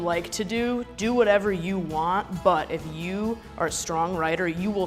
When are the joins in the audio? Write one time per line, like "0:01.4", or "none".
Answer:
none